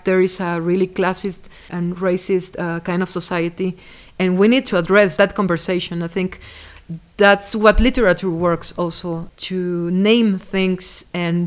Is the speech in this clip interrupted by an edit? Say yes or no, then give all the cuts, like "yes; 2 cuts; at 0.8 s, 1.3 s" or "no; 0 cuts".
yes; 3 cuts; at 1.7 s, 5.2 s, 9.3 s